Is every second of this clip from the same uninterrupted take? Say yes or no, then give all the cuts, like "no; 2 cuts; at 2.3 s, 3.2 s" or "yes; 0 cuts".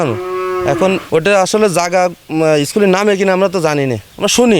no; 1 cut; at 1.0 s